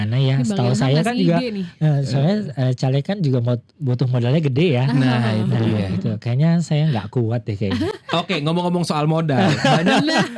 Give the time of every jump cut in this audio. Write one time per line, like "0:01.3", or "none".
none